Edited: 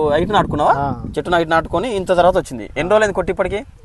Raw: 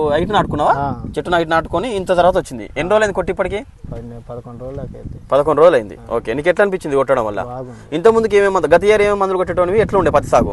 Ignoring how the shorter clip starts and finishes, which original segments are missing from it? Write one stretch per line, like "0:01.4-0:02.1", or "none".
none